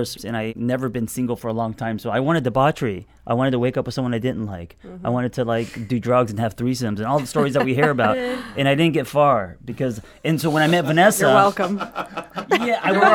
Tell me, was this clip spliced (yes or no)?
no